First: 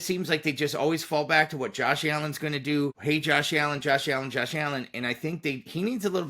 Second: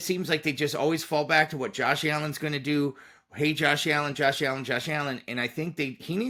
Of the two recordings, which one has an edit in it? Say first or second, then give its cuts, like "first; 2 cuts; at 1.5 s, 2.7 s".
first; 1 cut; at 3.0 s